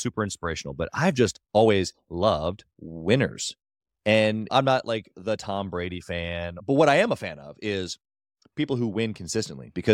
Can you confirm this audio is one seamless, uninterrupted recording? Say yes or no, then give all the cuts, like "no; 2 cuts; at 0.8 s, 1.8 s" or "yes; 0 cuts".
no; 3 cuts; at 1.4 s, 4.5 s, 6.6 s